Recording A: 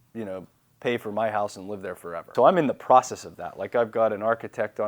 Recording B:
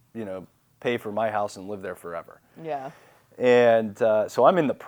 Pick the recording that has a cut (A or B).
A